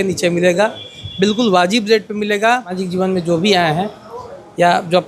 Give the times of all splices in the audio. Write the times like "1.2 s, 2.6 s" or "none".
2.8 s